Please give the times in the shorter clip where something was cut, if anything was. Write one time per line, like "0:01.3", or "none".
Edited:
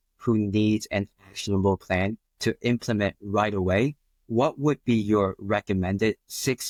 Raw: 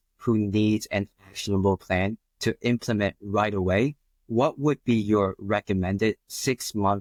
none

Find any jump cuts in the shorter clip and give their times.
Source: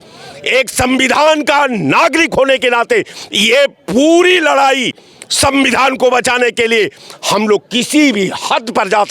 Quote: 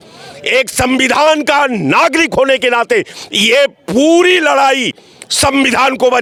none

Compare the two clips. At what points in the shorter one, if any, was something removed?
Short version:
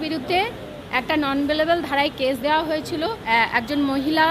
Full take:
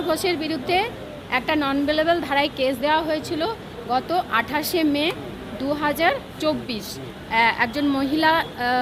0:03.2

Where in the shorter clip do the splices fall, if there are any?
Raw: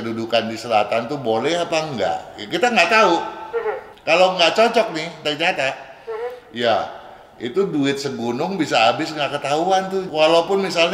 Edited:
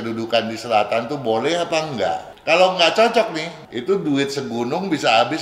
0:02.3
0:03.5

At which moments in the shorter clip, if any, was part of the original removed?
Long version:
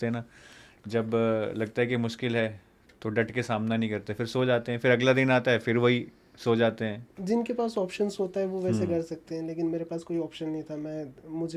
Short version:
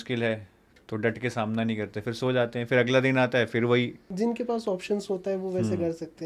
0:04.0

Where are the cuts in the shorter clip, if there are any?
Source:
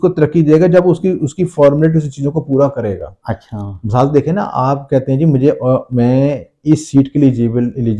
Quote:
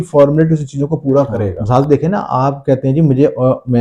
0:01.6

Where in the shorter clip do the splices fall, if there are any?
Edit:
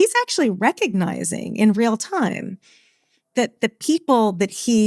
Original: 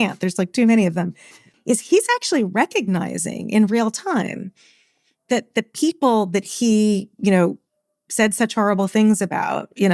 none

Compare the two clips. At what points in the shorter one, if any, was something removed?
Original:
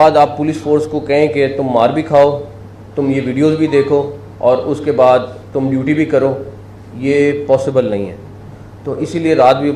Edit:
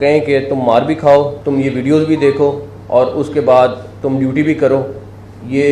0:01.4

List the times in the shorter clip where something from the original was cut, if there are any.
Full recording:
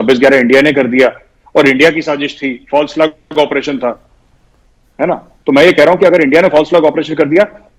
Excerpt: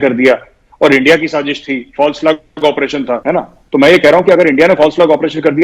0:03.2

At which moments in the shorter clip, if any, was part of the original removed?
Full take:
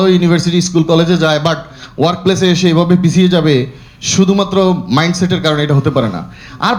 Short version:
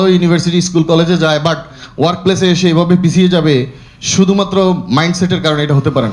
none

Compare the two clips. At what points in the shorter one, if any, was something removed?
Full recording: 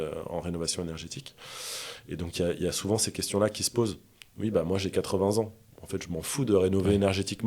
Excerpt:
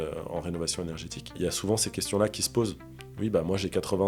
0:01.4

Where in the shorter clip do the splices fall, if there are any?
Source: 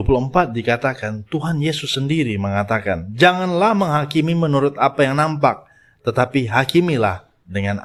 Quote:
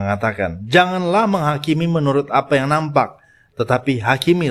none

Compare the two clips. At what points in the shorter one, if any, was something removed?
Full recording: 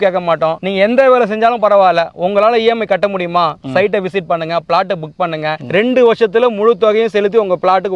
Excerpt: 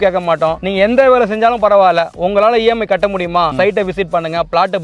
0:03.5

